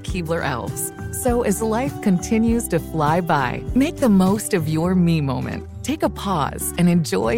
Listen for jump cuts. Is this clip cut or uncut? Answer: uncut